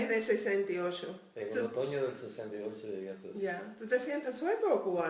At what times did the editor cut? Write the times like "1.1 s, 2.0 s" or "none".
none